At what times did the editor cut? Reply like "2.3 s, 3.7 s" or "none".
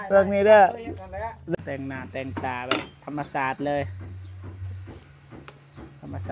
1.6 s